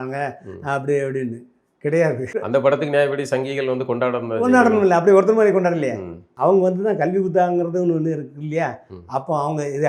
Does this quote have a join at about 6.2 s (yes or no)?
yes